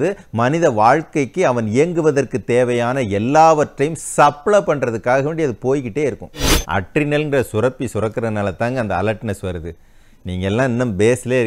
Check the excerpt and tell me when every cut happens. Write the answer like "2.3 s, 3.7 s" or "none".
6.5 s